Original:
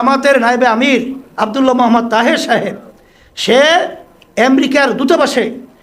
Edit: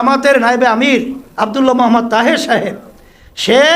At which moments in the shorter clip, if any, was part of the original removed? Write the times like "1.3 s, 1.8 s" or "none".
none